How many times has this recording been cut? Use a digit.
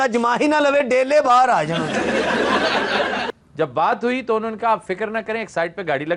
1